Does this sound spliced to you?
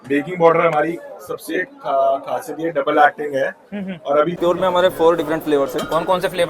yes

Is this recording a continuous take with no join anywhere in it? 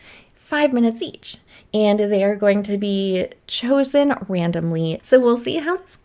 no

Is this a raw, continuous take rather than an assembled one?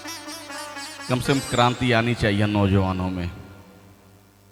yes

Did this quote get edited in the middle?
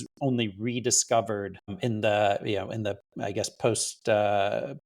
yes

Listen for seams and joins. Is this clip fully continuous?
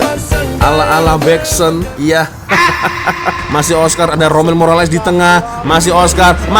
no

